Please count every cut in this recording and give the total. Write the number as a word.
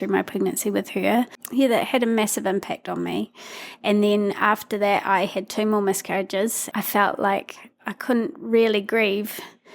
two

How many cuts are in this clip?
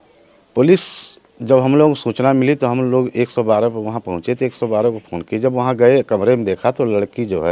zero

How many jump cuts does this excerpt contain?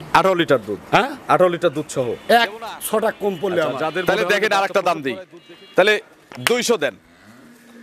one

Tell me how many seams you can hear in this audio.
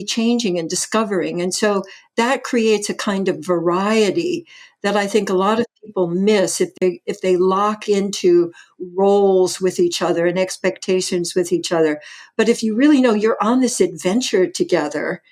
zero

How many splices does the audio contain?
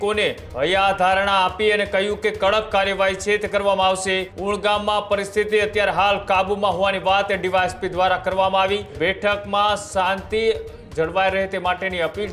two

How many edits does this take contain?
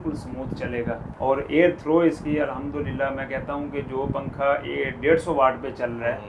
one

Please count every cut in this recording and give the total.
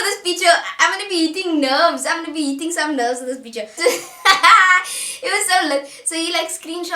one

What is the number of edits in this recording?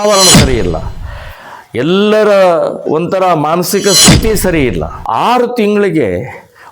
one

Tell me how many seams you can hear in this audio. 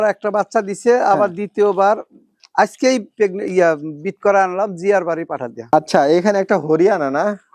one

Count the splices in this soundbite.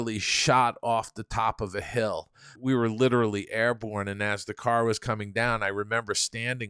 one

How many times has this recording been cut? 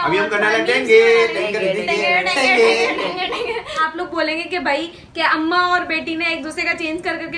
one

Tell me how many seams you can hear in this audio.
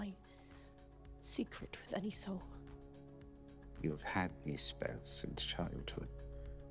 one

